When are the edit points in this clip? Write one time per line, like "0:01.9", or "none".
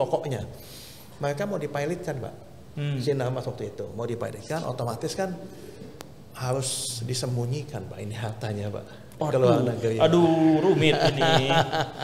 none